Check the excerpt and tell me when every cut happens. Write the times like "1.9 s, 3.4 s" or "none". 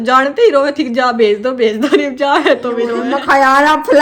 3.0 s